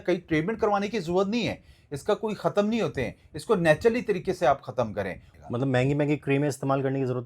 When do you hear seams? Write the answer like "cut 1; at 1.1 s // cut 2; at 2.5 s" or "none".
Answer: cut 1; at 5.2 s